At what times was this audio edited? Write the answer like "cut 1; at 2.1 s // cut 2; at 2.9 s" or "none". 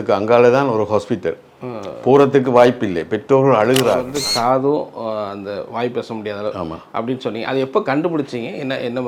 cut 1; at 4.1 s